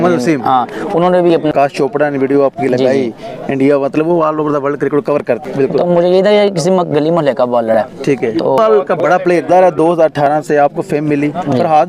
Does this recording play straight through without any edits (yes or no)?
no